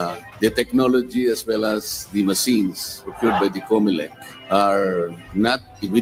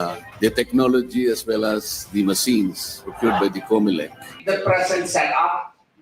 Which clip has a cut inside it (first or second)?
second